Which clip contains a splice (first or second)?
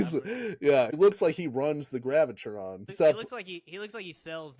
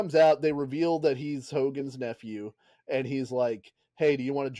first